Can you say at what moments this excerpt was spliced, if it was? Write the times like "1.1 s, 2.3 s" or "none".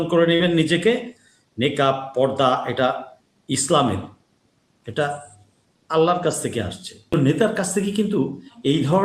7.1 s